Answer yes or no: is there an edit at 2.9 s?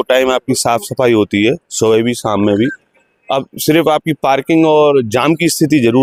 no